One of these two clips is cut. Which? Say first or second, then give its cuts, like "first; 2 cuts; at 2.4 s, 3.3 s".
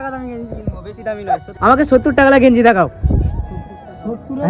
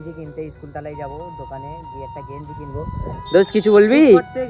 first; 1 cut; at 1.5 s